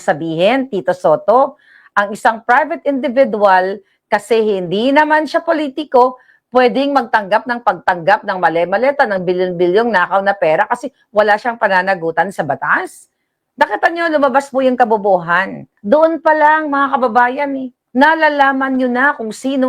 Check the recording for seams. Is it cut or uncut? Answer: cut